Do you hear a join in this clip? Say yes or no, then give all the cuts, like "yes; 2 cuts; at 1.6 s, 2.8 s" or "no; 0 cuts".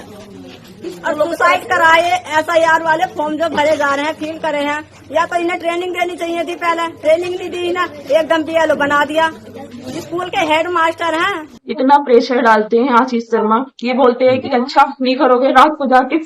yes; 1 cut; at 11.5 s